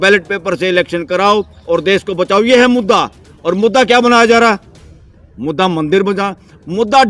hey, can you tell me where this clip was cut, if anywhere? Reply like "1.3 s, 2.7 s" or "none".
none